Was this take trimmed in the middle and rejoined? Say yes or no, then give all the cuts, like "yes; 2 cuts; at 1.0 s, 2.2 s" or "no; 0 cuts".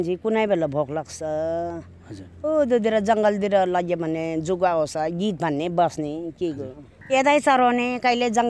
yes; 1 cut; at 6.9 s